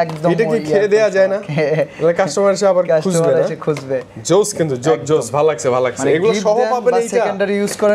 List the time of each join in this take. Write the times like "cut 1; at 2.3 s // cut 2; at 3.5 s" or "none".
none

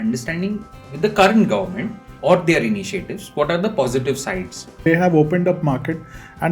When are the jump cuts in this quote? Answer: cut 1; at 4.8 s

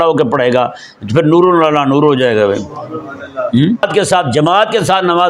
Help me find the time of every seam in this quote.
cut 1; at 3.8 s

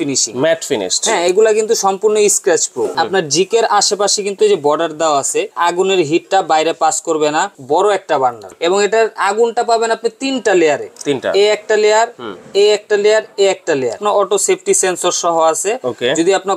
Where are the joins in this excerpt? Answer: cut 1; at 2.9 s // cut 2; at 5.5 s // cut 3; at 7.6 s // cut 4; at 8.5 s // cut 5; at 14.0 s

